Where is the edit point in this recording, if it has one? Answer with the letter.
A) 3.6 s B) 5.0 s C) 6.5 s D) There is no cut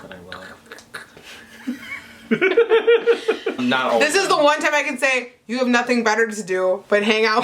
A